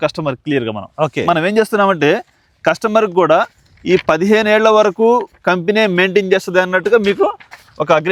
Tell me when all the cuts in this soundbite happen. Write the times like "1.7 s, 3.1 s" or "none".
none